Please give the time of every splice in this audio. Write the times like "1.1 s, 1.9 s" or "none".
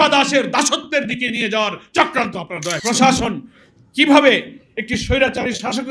2.8 s